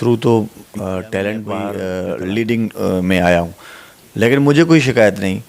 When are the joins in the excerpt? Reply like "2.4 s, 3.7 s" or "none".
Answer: 1.7 s